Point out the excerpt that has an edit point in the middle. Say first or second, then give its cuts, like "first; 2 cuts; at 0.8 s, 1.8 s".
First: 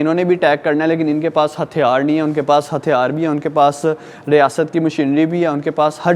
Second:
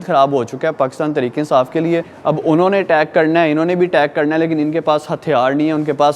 second; 1 cut; at 2.1 s